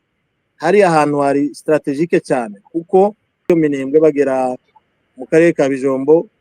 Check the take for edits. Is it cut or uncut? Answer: cut